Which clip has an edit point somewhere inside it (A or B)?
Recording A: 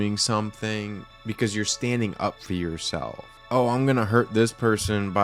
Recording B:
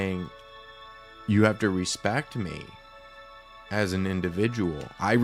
A